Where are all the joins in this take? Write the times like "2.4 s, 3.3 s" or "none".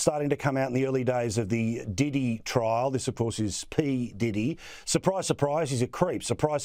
none